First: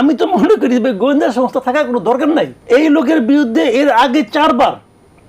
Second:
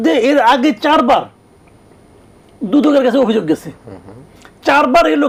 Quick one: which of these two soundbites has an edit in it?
first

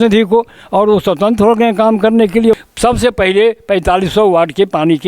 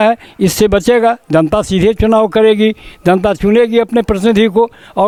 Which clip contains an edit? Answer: first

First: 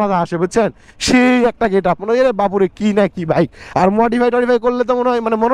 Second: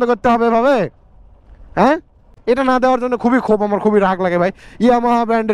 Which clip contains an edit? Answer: second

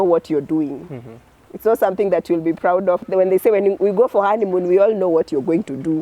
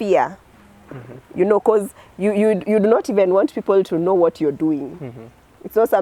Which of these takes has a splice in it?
first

